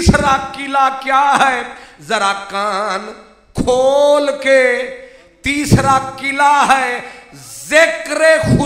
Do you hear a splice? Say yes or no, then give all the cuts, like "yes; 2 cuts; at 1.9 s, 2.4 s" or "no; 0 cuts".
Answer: no; 0 cuts